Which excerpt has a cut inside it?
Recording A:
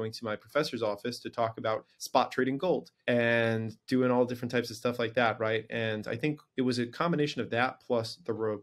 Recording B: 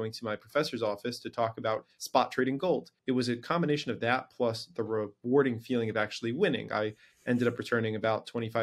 B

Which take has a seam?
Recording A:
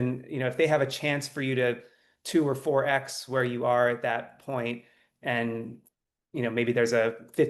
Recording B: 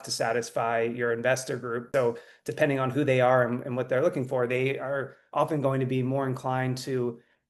B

